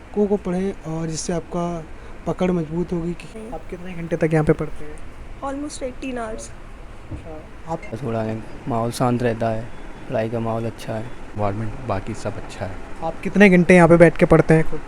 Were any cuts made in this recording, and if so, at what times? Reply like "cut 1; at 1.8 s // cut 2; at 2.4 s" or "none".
cut 1; at 3.3 s // cut 2; at 7.9 s // cut 3; at 11.4 s